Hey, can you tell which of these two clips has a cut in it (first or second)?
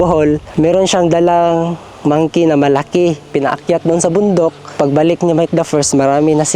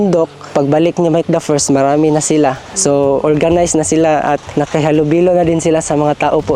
first